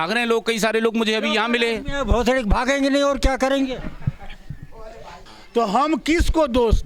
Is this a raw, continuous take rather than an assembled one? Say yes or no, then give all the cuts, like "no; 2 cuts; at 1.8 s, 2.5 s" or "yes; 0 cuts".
no; 1 cut; at 5.2 s